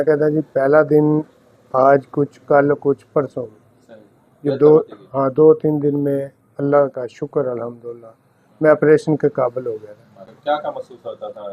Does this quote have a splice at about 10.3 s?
yes; 1 cut; at 10.3 s

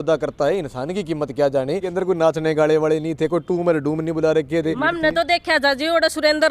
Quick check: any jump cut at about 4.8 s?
yes; 2 cuts; at 1.9 s, 4.8 s

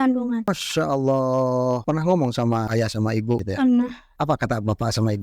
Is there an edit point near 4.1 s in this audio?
yes; 3 cuts; at 1.8 s, 3.4 s, 4.1 s

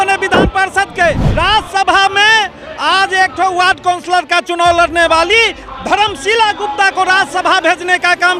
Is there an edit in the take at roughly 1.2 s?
yes; 1 cut; at 1.2 s

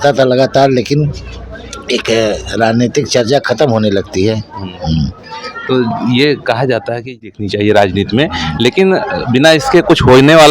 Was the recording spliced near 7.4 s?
yes; 1 cut; at 7.4 s

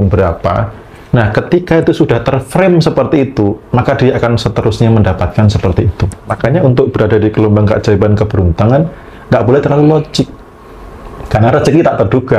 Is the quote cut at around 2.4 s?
no; 1 cut; at 6.3 s

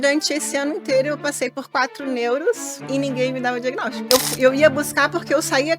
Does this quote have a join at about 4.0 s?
yes; 1 cut; at 4.0 s

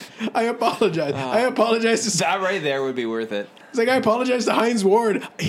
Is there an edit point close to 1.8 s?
no; 1 cut; at 3.6 s

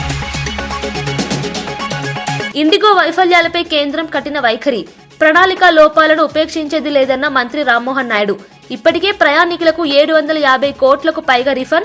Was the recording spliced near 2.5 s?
yes; 1 cut; at 2.5 s

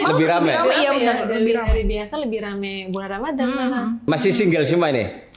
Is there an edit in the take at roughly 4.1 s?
yes; 1 cut; at 4.1 s

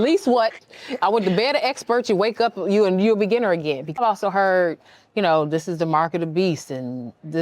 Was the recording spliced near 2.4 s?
no; 1 cut; at 4.0 s

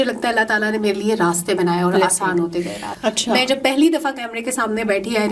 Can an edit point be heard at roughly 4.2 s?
no; 1 cut; at 2.9 s

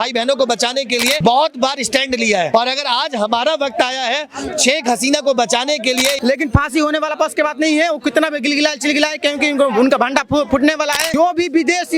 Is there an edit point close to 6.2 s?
yes; 4 cuts; at 1.2 s, 2.5 s, 6.2 s, 11.0 s

